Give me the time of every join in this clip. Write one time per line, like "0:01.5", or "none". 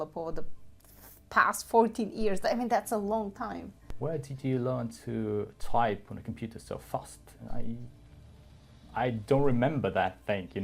0:03.9